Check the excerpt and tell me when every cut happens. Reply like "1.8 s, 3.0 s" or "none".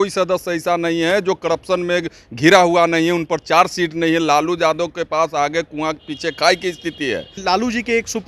7.3 s